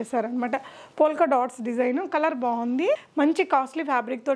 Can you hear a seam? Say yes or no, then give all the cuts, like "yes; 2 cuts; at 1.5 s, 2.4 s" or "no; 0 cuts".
yes; 1 cut; at 3.0 s